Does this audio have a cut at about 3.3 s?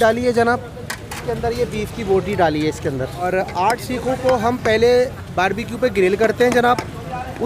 yes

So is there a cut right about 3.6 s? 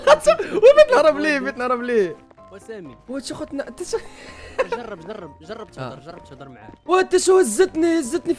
no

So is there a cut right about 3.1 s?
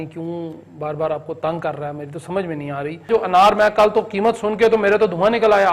yes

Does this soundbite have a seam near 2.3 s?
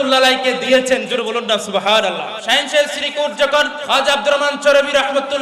yes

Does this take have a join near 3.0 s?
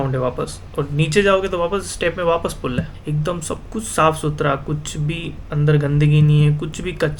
yes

